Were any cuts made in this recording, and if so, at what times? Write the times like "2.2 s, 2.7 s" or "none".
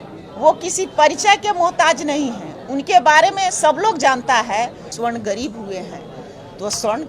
4.9 s